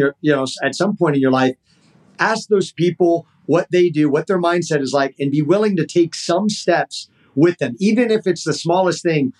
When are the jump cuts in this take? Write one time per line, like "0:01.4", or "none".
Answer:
none